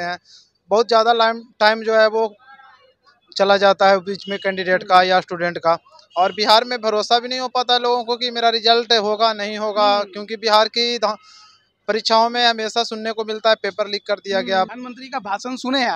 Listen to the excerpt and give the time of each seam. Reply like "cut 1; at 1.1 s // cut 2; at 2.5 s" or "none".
cut 1; at 14.7 s